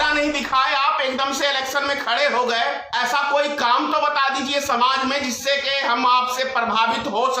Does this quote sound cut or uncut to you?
cut